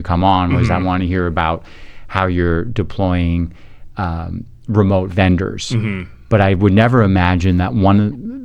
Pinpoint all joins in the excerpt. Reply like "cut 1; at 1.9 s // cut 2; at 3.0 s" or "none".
none